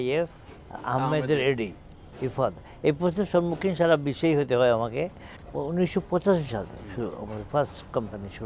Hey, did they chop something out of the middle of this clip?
no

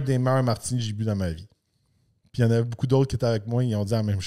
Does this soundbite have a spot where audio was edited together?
no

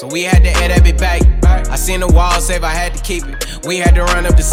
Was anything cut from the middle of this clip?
no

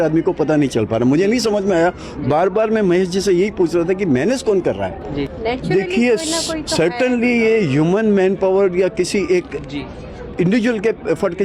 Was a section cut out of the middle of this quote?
yes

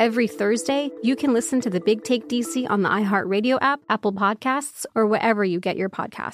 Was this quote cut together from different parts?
yes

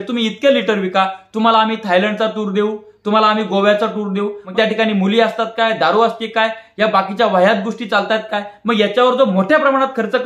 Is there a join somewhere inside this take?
yes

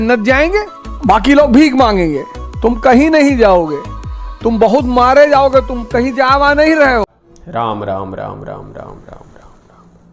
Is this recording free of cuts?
yes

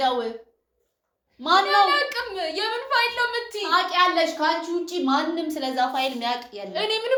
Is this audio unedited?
yes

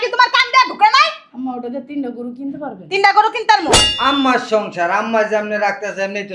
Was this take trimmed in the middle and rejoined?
yes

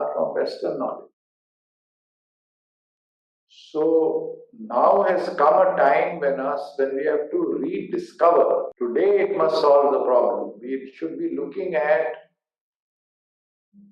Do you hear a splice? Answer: yes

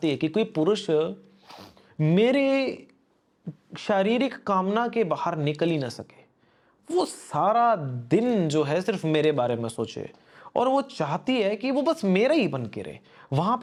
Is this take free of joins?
yes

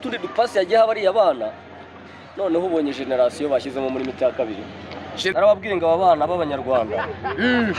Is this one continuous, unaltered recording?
no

